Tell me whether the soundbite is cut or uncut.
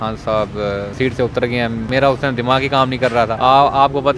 cut